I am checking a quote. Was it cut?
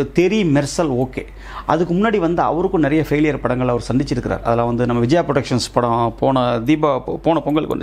no; 0 cuts

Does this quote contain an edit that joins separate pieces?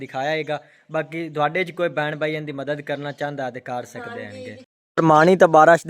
yes; 1 cut; at 4.6 s

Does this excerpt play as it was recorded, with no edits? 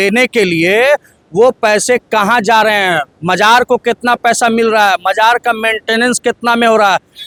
yes; 0 cuts

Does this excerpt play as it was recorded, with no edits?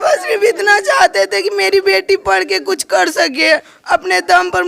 yes; 0 cuts

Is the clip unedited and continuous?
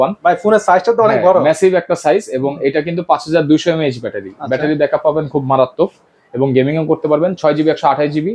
yes; 0 cuts

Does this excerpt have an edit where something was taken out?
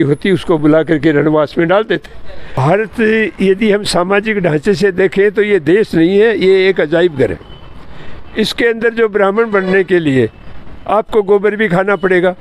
yes; 1 cut; at 2.5 s

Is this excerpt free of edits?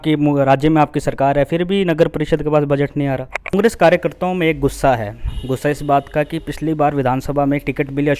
no; 1 cut; at 3.5 s

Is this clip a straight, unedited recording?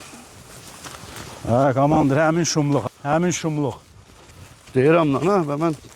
yes; 0 cuts

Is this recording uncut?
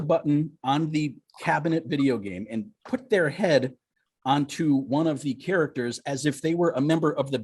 yes; 0 cuts

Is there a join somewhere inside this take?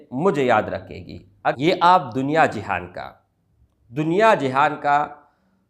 yes; 1 cut; at 1.5 s

